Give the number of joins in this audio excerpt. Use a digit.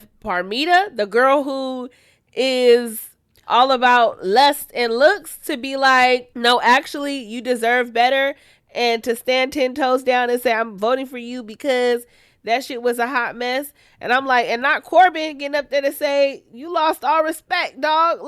0